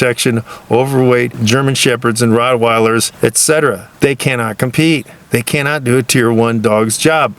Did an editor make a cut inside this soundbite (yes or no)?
yes